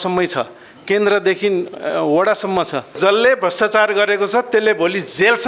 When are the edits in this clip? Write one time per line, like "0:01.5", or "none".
0:02.9